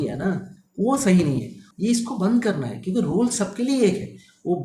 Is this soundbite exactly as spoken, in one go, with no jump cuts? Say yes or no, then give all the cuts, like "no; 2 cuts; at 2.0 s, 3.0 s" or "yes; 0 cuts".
no; 1 cut; at 1.6 s